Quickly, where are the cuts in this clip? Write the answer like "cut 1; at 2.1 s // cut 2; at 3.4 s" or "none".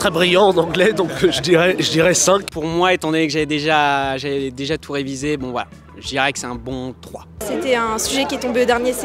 cut 1; at 2.5 s // cut 2; at 7.4 s